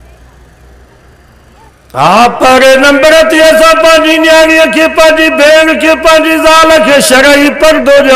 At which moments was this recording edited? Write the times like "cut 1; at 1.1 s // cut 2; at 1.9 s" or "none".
cut 1; at 1.7 s